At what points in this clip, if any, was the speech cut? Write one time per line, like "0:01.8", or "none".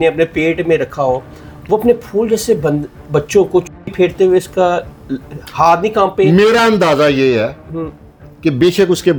none